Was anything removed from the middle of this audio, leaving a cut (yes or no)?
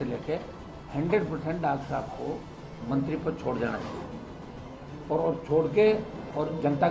no